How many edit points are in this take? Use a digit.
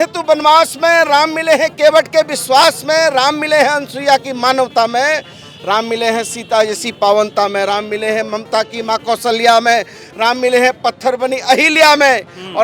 0